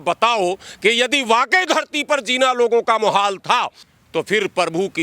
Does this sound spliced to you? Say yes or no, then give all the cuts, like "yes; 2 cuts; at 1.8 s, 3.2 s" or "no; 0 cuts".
yes; 1 cut; at 3.8 s